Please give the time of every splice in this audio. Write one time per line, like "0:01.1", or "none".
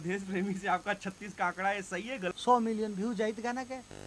0:02.3